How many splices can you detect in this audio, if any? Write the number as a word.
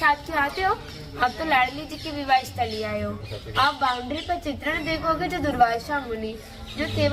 zero